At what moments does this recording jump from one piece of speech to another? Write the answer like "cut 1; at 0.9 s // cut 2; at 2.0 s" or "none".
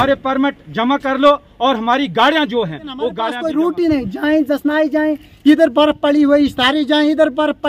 cut 1; at 3.3 s